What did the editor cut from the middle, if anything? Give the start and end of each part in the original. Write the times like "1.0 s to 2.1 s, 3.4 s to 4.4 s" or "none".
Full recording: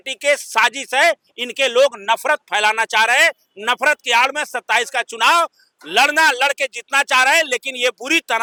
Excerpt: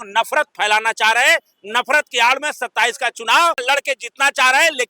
5.6 s to 6.4 s